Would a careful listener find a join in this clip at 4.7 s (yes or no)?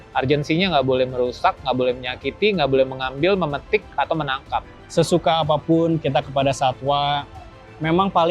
yes